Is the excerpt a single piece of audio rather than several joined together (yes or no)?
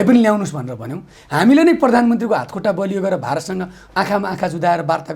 yes